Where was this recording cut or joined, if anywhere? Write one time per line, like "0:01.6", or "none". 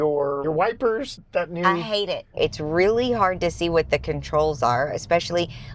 0:01.2
0:02.4